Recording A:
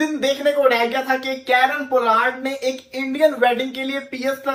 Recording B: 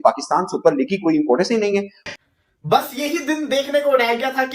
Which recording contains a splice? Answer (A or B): B